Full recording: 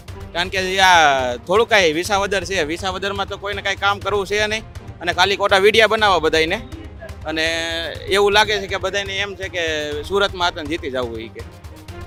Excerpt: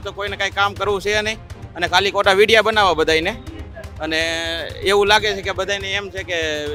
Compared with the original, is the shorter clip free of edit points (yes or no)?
yes